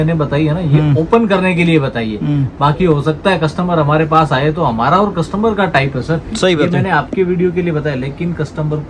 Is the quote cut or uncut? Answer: uncut